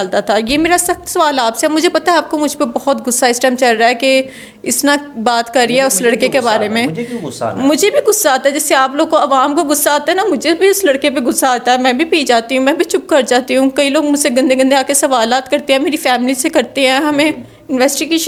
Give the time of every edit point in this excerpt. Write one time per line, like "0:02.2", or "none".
none